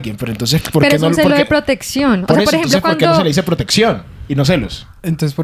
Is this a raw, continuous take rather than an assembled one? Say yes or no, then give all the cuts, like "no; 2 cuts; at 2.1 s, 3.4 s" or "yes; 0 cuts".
yes; 0 cuts